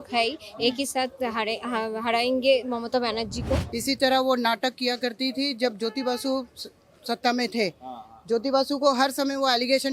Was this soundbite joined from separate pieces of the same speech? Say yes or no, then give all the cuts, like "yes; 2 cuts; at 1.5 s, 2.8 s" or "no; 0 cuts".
yes; 1 cut; at 3.7 s